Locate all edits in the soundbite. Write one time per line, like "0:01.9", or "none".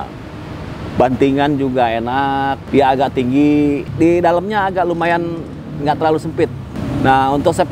0:02.6
0:03.9
0:06.7